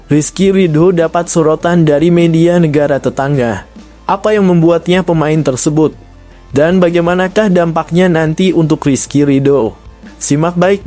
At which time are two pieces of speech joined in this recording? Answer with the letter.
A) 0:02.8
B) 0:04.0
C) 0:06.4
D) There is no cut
D